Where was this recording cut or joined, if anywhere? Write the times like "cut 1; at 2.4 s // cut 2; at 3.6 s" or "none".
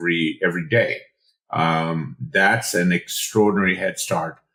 none